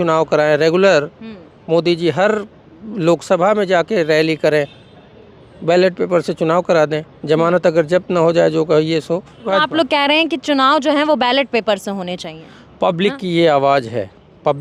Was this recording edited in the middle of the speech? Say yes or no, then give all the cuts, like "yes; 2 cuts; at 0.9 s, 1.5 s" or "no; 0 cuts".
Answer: yes; 1 cut; at 9.5 s